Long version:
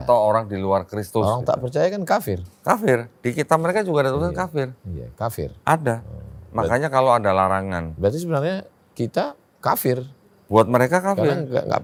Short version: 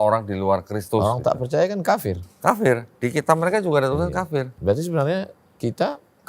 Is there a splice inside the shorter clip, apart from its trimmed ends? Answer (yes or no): yes